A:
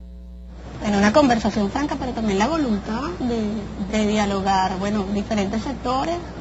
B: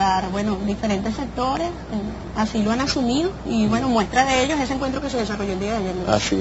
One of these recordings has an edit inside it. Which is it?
A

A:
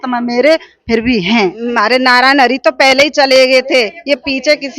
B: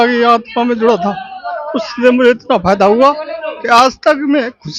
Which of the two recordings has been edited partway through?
A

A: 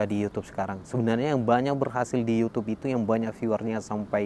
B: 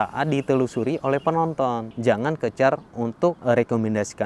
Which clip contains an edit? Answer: B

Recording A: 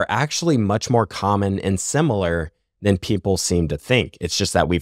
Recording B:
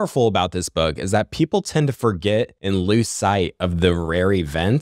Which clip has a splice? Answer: B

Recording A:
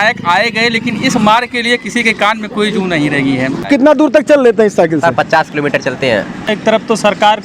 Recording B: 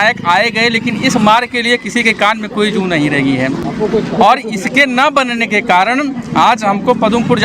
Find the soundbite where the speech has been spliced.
A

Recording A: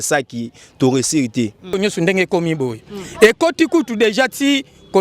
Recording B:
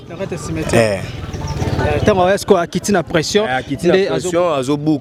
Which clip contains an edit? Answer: A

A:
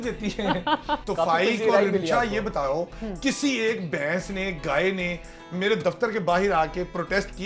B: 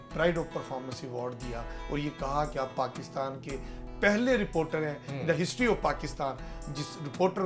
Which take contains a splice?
A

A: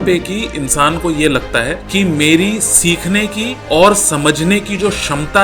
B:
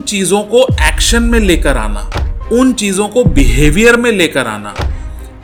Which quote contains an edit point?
A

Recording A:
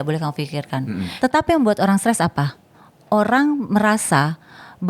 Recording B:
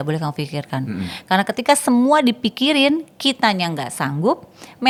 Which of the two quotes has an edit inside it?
A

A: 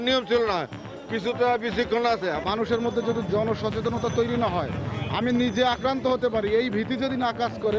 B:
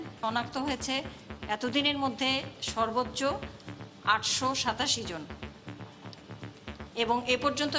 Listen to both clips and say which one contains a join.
A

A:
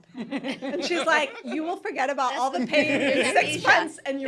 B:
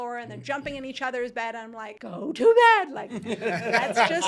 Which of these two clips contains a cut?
B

